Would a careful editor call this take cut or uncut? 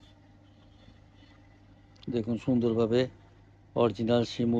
uncut